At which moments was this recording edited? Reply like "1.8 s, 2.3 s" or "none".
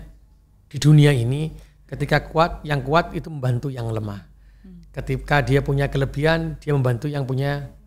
none

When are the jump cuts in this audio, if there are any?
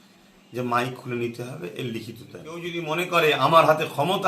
2.7 s

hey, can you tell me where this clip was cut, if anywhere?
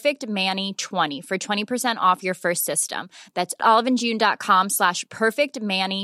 1.2 s

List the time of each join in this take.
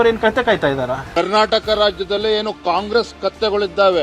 1.1 s

